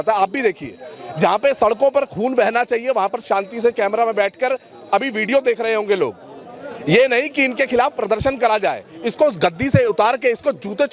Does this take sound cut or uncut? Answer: uncut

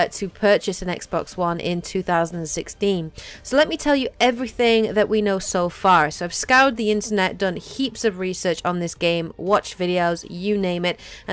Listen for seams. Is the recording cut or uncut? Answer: cut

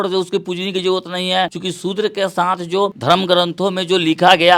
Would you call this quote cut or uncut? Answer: uncut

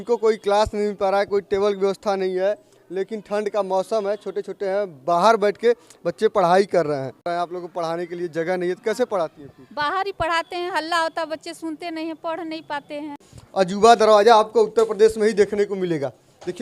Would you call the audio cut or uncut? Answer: cut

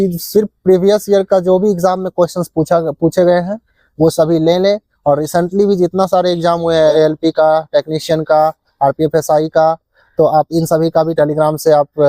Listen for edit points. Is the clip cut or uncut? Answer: cut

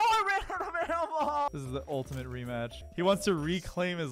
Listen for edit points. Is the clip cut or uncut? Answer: cut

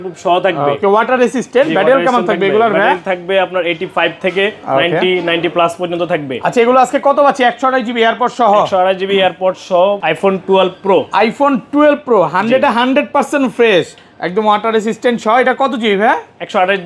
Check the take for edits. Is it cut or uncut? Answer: cut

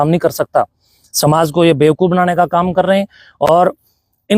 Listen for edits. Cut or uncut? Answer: uncut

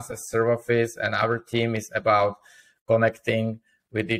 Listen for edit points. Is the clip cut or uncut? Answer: uncut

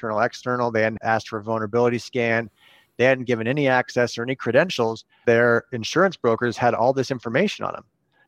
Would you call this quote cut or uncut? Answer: cut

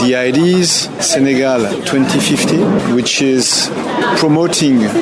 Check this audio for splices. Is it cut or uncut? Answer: cut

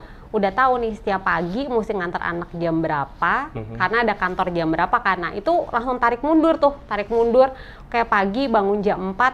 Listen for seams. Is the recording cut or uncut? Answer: uncut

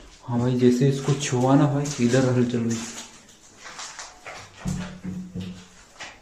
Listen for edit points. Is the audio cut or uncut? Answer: uncut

